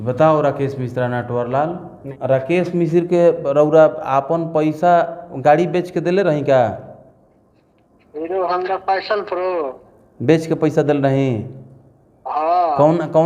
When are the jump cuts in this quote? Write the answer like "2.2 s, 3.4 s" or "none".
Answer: 2.1 s